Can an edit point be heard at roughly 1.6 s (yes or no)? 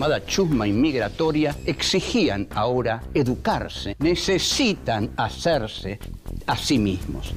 yes